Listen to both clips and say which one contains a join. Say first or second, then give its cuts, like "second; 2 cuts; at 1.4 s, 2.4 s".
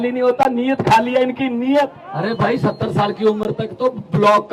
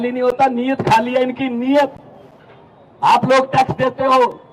first; 1 cut; at 2.0 s